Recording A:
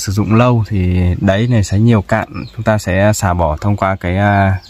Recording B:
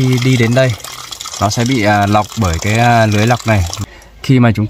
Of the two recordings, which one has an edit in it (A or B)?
B